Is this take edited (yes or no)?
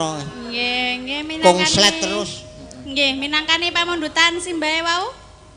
no